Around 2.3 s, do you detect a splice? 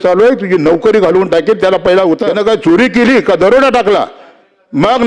yes; 1 cut; at 2.3 s

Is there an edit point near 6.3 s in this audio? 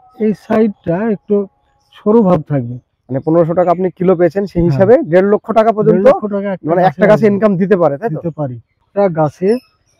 no; 2 cuts; at 3.0 s, 8.8 s

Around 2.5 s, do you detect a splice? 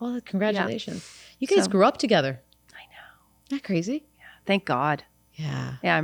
no; 0 cuts

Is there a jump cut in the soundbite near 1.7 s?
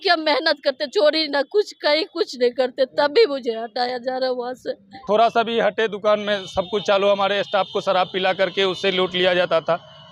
no; 1 cut; at 5.0 s

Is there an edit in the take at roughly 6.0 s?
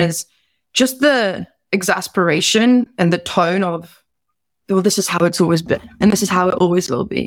yes; 1 cut; at 6.0 s

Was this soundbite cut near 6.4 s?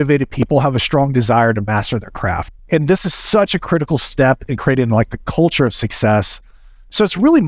no; 1 cut; at 2.5 s

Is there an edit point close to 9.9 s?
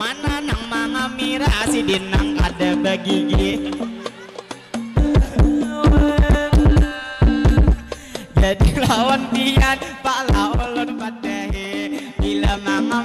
no; 1 cut; at 5.0 s

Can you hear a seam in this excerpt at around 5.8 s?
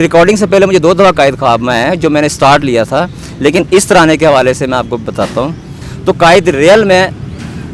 yes; 1 cut; at 5.8 s

